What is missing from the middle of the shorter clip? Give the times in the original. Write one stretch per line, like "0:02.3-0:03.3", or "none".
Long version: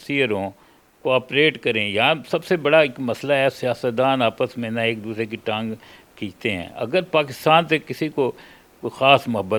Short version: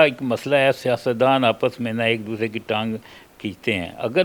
none